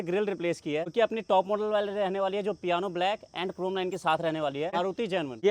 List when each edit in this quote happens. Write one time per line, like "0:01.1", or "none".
0:00.9
0:04.8